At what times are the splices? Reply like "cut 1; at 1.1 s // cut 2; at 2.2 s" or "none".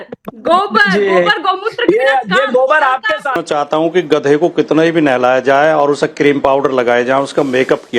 cut 1; at 3.4 s